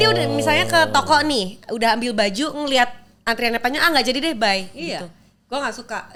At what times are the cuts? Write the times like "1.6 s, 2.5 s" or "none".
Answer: none